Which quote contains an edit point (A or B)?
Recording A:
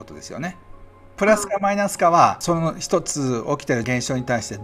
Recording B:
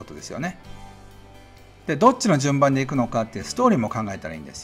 A